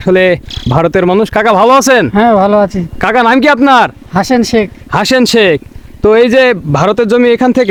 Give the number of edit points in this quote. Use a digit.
0